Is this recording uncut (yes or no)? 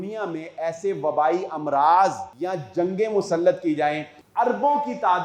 no